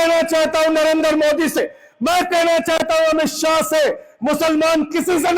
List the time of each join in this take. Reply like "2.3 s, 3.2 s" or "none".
1.6 s